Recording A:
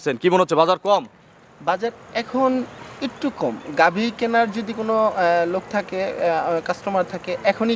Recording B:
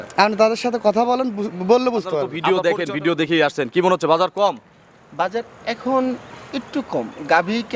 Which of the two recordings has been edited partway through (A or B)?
B